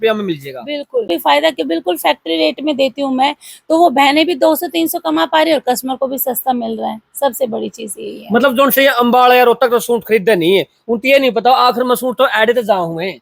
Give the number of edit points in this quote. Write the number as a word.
one